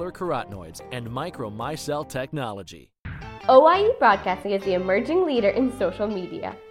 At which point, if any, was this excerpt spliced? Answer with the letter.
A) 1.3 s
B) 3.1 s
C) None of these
B